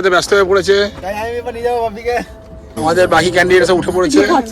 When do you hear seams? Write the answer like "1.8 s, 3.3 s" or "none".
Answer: 2.8 s